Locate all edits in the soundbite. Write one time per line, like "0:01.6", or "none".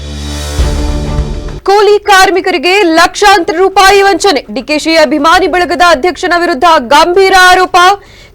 0:01.6